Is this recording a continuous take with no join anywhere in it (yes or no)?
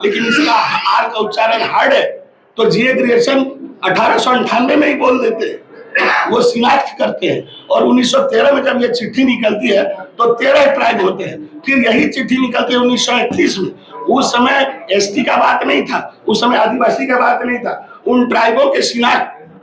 yes